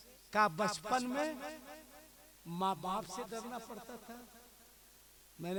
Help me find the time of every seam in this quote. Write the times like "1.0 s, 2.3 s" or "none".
none